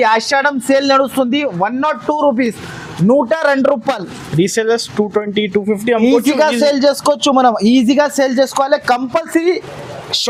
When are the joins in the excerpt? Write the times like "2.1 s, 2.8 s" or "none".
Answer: none